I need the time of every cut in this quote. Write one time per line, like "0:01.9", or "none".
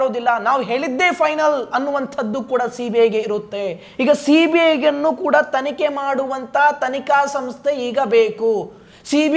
none